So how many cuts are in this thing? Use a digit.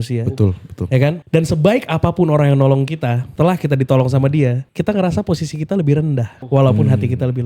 2